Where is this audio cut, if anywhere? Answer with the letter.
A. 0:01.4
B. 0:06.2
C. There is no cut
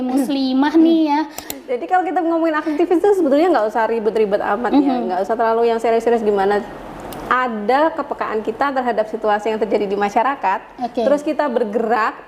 A